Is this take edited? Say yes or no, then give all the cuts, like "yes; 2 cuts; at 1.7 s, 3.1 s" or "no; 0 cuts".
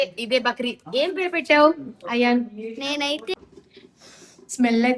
yes; 1 cut; at 3.3 s